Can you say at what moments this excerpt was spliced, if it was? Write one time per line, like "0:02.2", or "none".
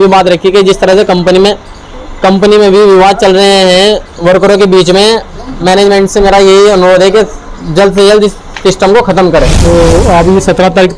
0:09.6